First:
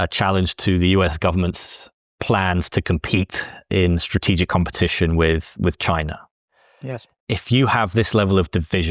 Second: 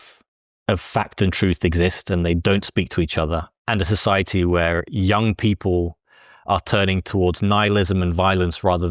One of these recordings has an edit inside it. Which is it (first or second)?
second